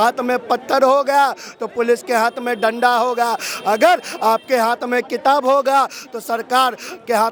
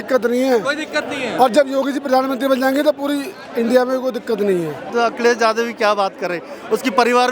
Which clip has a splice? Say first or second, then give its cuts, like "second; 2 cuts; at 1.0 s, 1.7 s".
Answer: second; 1 cut; at 4.8 s